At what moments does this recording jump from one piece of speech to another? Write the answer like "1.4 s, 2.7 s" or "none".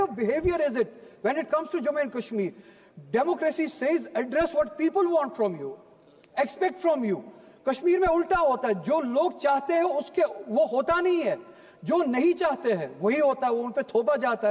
none